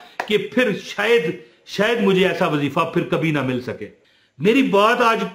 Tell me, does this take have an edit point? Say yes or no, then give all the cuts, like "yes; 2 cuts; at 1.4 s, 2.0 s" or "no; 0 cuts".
yes; 1 cut; at 4.0 s